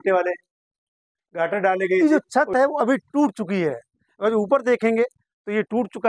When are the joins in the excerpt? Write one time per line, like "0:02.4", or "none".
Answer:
0:02.0